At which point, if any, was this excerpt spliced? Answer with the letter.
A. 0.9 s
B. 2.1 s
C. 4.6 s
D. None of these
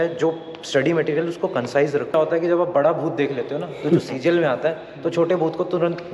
B